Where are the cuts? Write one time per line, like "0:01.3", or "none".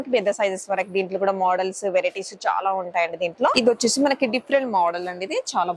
0:03.5